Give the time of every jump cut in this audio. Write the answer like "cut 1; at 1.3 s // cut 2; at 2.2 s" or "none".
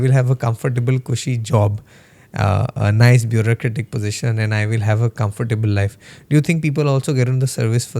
none